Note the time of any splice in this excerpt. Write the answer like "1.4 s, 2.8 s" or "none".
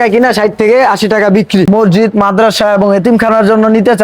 1.7 s